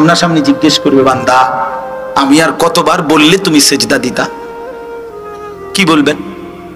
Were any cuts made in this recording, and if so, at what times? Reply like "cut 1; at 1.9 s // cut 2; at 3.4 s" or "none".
cut 1; at 4.3 s // cut 2; at 5.8 s